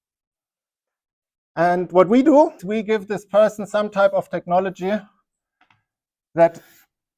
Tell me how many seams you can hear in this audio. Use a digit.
1